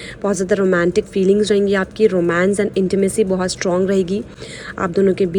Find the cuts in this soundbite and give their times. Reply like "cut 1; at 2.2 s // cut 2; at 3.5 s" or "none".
none